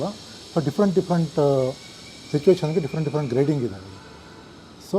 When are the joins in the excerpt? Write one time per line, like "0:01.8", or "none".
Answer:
none